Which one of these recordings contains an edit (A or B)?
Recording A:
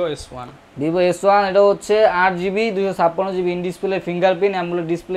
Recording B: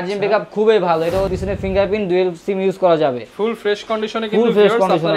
B